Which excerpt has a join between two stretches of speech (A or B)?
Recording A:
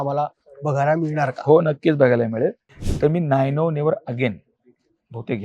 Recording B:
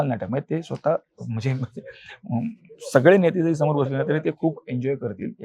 A